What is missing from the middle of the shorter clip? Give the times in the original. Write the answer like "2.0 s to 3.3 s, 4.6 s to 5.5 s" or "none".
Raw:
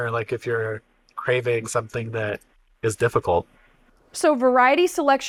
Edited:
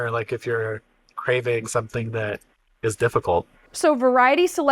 3.6 s to 4.0 s

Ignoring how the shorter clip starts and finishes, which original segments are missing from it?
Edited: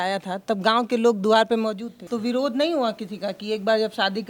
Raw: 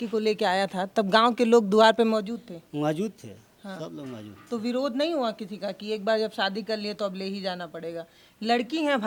2.4 s to 4.3 s

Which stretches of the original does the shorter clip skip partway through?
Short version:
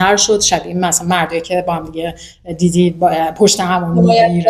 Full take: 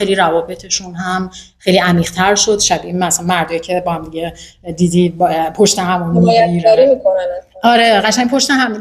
none

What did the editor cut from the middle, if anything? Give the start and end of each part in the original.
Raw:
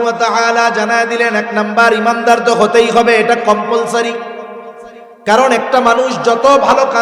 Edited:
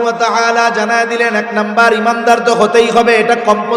none

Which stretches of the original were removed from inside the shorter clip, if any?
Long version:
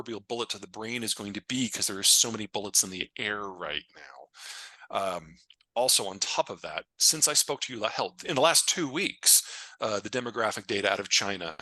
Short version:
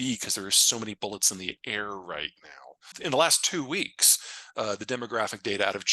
4.5 s to 8.2 s

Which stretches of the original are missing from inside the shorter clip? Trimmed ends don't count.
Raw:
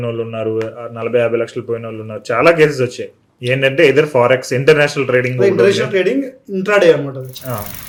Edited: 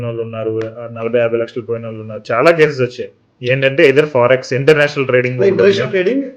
none

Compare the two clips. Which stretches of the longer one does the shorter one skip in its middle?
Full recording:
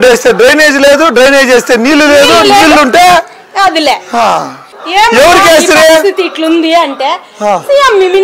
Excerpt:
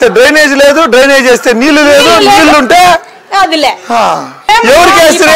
4.6 s to 4.8 s

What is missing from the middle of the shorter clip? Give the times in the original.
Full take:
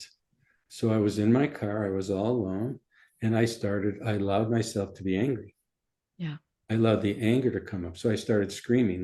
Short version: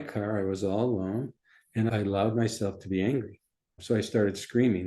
3.4 s to 4.0 s, 5.8 s to 7.8 s

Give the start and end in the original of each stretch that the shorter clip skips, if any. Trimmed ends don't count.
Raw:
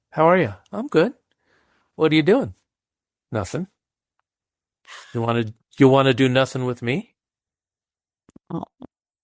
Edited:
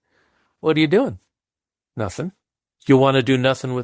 4.0 s to 5.6 s

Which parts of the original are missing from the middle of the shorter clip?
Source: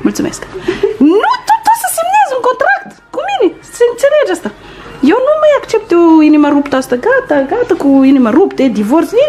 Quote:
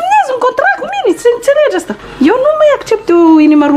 3.1 s to 3.6 s, 4.5 s to 4.8 s

